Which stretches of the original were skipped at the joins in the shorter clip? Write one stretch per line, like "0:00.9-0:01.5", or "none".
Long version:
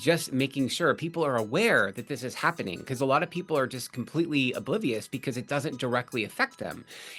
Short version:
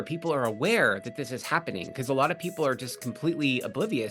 none